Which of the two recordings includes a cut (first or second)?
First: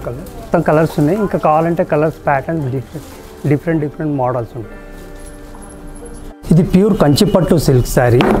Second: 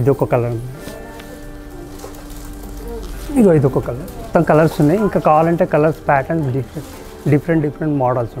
first